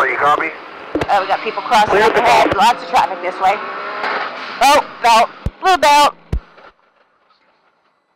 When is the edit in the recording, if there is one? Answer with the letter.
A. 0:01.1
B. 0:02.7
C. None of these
A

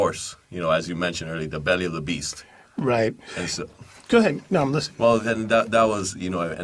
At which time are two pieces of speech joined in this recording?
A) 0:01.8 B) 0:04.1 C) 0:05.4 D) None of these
C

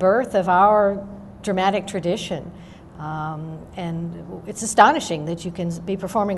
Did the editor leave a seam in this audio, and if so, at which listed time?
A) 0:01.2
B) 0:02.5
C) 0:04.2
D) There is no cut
C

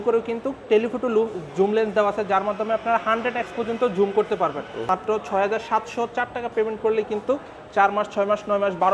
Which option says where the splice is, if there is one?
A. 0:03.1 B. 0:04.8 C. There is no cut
B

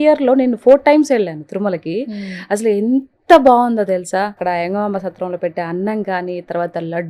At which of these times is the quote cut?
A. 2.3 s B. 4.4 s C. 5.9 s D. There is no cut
B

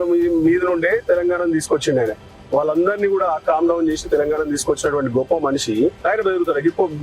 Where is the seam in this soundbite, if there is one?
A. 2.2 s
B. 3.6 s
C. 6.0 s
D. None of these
C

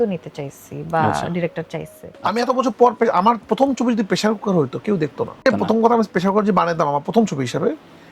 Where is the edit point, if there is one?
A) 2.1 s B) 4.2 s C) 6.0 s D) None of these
D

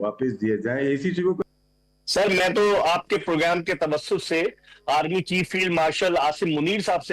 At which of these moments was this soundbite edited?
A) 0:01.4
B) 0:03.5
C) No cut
A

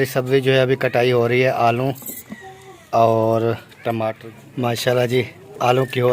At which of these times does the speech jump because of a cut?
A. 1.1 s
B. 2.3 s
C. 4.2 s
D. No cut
C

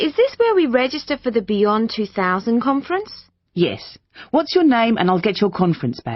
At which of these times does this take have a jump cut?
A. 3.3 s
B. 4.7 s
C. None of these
C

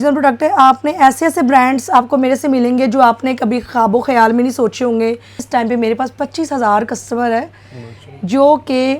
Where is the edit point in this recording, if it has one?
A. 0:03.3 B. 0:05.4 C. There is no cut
B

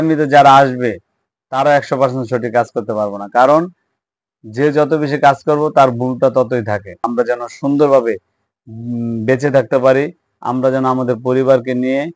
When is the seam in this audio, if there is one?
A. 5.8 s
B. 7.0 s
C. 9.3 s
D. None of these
B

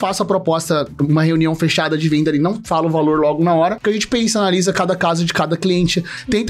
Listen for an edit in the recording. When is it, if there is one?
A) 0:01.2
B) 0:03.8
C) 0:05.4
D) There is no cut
B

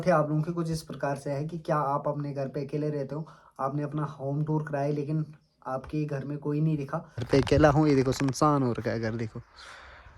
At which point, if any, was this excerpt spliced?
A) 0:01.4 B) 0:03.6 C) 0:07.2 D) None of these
C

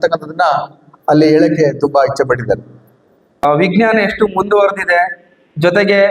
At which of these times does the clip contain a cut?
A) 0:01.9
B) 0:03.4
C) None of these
B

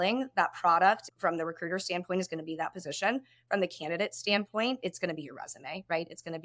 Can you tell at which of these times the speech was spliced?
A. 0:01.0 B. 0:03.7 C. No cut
A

